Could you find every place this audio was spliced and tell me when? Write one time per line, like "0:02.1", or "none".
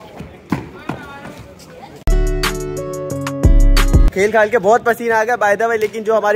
none